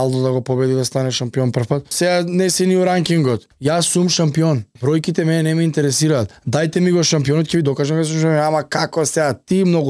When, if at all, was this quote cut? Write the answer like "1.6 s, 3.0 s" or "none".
1.9 s, 3.5 s, 4.7 s, 6.4 s